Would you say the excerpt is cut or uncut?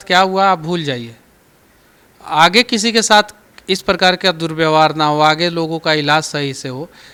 uncut